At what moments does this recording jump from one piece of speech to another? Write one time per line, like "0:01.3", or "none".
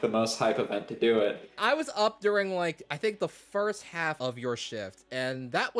0:01.6
0:04.2